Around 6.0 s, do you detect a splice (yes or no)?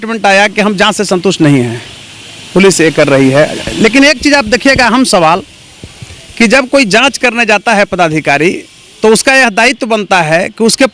no